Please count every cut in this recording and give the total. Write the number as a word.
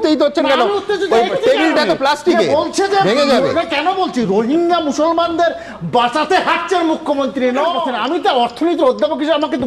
one